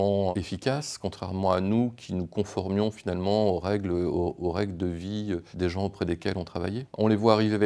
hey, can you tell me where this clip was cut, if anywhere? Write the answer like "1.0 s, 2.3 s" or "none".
none